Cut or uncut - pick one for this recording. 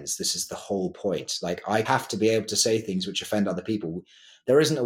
cut